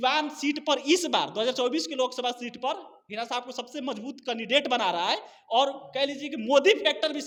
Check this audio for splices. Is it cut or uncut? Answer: uncut